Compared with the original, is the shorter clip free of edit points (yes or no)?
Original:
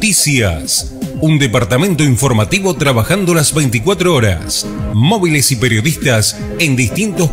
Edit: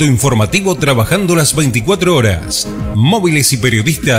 yes